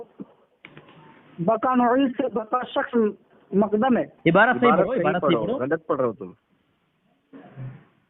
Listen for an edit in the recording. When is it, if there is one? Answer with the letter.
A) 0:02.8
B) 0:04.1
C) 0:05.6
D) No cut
B